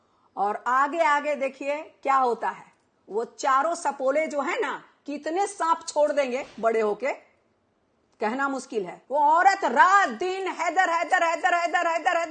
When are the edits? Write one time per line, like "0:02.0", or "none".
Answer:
0:09.0